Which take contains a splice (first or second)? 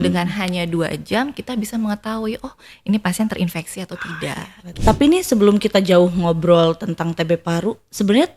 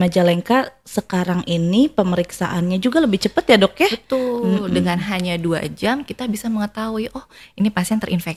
first